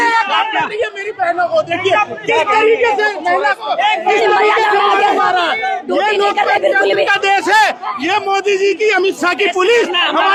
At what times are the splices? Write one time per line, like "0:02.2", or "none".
none